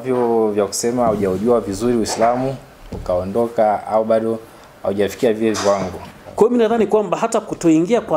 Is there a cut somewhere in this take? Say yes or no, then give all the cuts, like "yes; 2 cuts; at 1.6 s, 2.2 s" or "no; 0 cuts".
yes; 1 cut; at 6.2 s